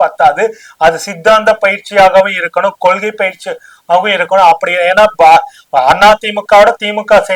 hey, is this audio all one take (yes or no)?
yes